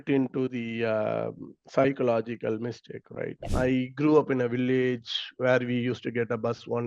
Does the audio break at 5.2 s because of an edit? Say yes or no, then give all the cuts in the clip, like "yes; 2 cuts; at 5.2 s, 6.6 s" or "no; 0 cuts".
no; 1 cut; at 3.5 s